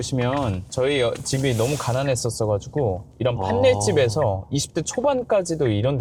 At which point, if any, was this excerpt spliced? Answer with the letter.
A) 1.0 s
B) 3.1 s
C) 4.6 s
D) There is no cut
D